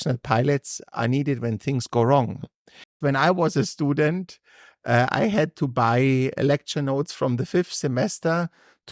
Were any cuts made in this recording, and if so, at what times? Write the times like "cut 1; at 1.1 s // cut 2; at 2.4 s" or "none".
cut 1; at 3.0 s

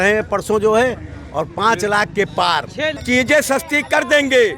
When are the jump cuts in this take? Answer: cut 1; at 2.9 s

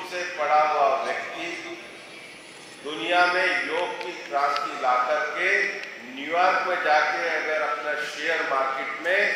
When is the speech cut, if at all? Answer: none

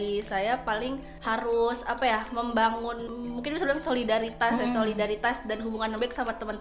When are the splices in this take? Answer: cut 1; at 1.1 s // cut 2; at 3.1 s

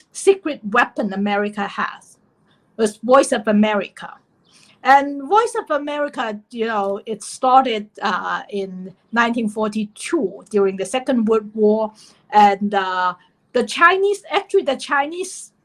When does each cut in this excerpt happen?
none

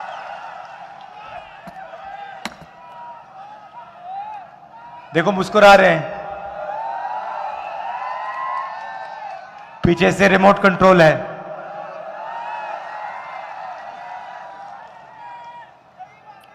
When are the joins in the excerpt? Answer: none

